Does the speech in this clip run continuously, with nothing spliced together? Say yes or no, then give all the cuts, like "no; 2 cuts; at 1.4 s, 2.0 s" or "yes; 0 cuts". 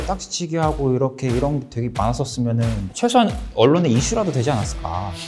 yes; 0 cuts